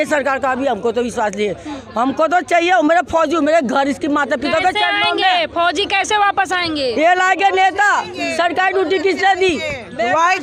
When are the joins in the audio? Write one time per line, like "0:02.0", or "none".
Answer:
none